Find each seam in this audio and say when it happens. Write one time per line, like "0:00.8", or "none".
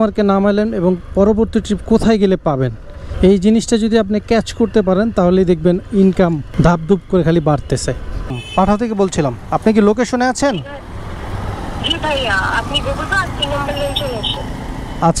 0:06.4
0:08.3